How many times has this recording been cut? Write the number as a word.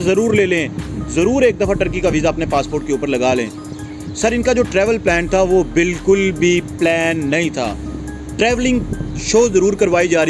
zero